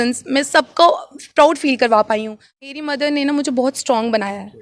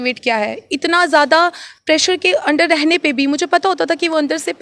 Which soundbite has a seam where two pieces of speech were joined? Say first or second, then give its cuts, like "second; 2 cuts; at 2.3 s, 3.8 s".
first; 1 cut; at 2.7 s